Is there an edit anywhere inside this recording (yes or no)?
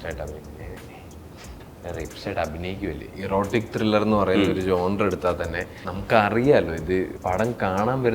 yes